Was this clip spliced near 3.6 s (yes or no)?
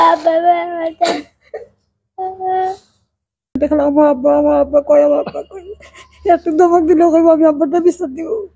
yes